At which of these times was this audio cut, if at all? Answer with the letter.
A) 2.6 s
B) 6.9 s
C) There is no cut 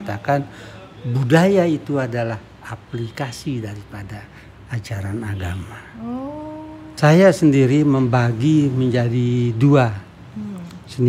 B